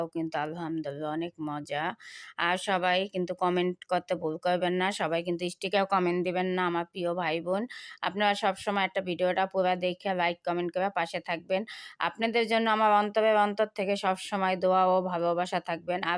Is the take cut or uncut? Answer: uncut